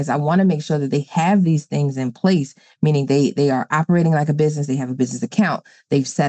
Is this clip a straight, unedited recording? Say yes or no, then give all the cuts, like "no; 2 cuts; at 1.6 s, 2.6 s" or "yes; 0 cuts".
yes; 0 cuts